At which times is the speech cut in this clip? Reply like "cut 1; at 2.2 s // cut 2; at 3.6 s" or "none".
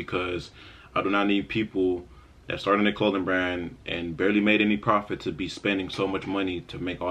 none